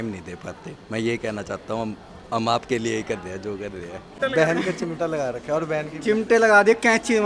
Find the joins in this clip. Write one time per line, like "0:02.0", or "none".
0:04.1